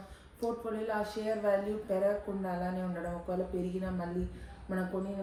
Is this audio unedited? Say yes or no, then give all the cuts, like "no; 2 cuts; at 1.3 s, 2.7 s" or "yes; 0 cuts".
yes; 0 cuts